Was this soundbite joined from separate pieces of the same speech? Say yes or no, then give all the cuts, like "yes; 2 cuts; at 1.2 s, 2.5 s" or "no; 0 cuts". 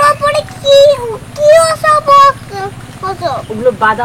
no; 0 cuts